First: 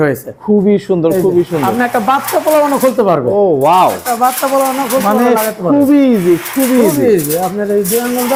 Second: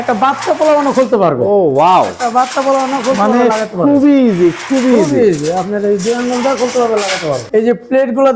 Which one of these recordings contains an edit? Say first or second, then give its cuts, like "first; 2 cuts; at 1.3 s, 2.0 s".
second; 1 cut; at 7.4 s